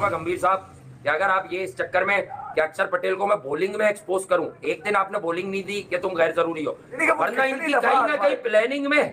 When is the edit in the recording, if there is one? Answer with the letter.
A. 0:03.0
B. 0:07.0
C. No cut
B